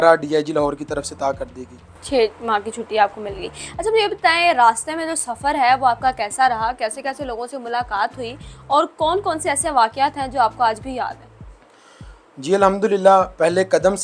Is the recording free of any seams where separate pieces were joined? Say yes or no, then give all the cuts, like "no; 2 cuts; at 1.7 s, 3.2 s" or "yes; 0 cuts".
yes; 0 cuts